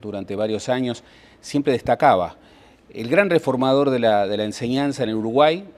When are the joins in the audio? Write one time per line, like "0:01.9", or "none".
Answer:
none

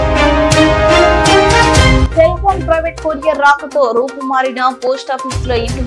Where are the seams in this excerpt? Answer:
none

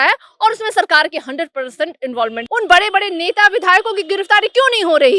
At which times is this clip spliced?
0:02.4

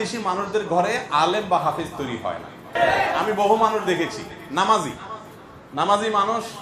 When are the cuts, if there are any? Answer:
0:02.8

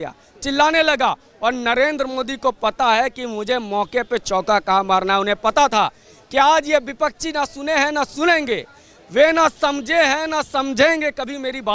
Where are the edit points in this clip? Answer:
none

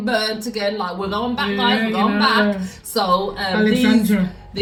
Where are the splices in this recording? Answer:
none

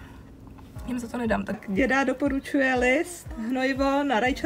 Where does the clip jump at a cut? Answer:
0:01.6

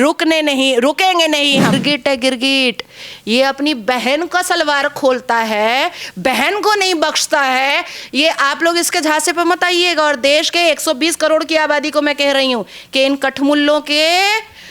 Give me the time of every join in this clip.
0:01.7

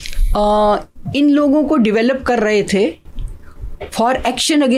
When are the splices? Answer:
none

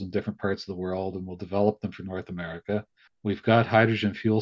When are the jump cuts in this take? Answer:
0:03.0

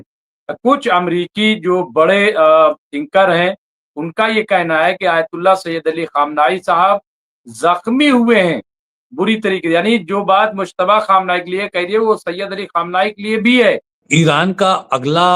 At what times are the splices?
0:13.9

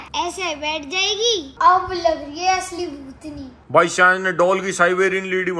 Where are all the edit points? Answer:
0:01.5

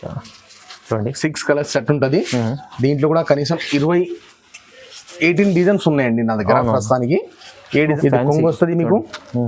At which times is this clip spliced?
0:08.0

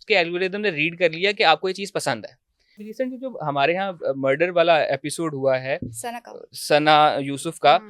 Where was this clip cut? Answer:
0:02.9

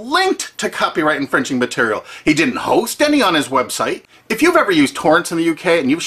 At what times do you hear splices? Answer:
0:03.5

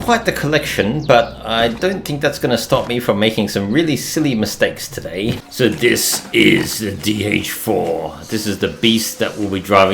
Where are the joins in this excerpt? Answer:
0:05.4

